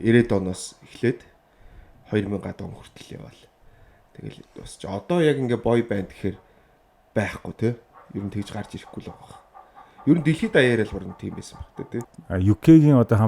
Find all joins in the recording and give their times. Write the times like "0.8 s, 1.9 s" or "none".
12.1 s

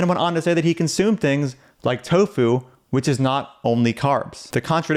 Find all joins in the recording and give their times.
none

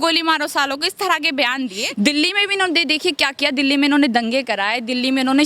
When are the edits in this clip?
1.8 s

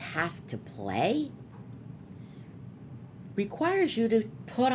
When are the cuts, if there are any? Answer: none

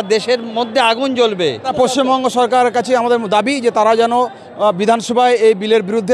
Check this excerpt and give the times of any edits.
1.7 s

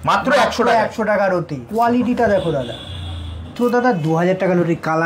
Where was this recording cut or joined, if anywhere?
1.6 s, 3.5 s

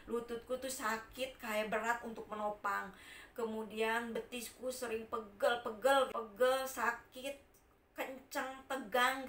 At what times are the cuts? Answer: 6.1 s

